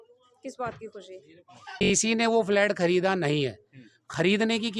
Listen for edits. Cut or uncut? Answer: cut